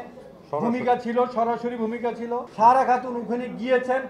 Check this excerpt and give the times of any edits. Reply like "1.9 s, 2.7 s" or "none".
2.5 s